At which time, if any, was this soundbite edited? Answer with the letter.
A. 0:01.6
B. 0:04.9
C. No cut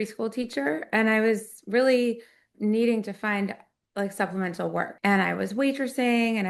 B